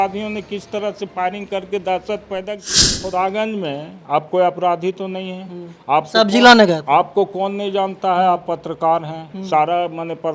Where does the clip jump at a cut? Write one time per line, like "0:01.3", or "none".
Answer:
0:03.0